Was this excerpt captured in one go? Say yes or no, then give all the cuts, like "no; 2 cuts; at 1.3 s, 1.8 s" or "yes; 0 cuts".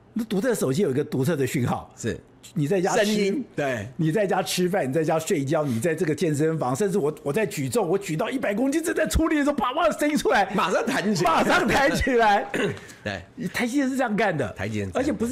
yes; 0 cuts